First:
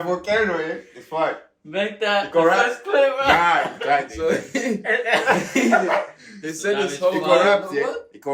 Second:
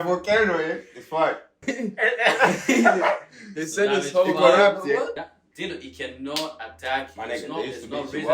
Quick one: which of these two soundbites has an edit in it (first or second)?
second